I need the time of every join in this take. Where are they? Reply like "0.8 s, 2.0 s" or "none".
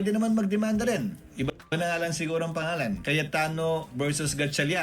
3.5 s